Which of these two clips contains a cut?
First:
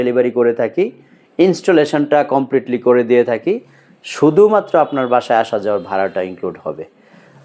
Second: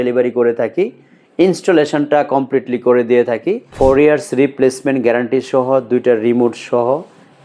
second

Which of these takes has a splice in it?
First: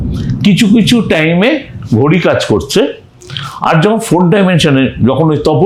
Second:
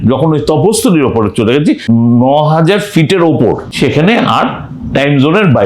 second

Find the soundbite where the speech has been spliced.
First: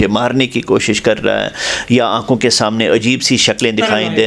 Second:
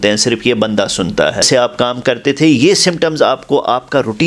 second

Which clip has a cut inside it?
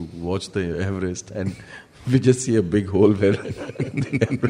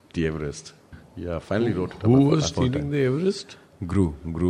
second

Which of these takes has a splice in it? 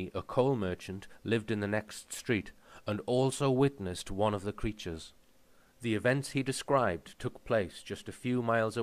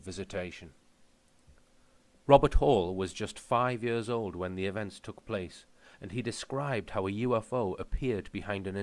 second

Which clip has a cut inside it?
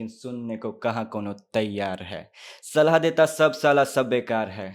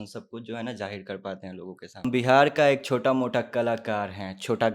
second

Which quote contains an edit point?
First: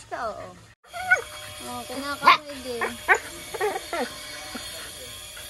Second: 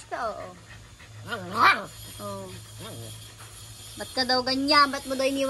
first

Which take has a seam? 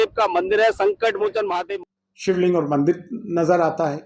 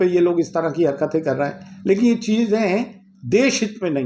first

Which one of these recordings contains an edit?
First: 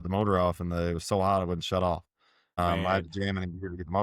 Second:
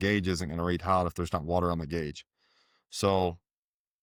first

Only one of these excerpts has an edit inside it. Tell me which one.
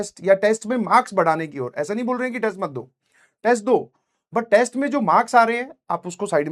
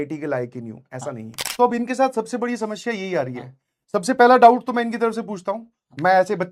second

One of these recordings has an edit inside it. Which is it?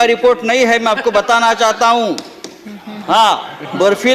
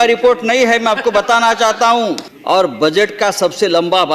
second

